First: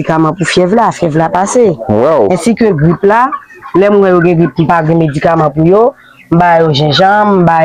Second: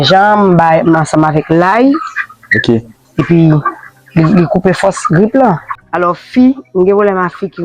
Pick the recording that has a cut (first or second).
second